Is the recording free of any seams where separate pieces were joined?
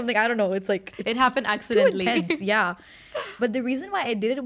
yes; 0 cuts

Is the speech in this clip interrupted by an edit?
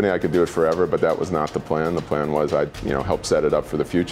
yes; 1 cut; at 2.8 s

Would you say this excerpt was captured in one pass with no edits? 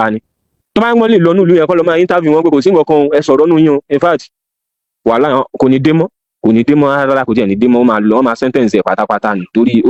yes; 0 cuts

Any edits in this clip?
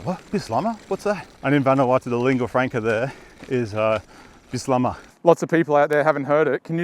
yes; 2 cuts; at 1.3 s, 5.0 s

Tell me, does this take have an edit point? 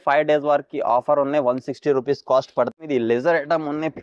yes; 1 cut; at 2.7 s

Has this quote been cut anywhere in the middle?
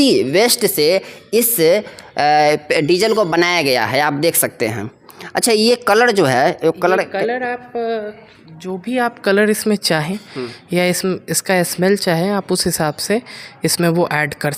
no; 0 cuts

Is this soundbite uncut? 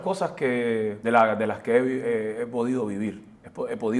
no; 1 cut; at 1.0 s

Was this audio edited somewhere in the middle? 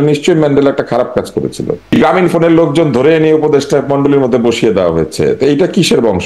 yes; 1 cut; at 2.0 s

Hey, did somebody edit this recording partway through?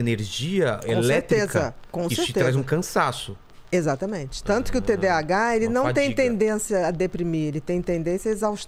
no; 0 cuts

